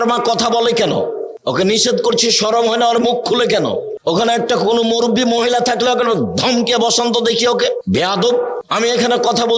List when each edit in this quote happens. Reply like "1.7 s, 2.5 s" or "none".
1.3 s, 3.9 s, 7.8 s, 8.6 s